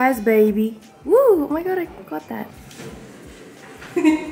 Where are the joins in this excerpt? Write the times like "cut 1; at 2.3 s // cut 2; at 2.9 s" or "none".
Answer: none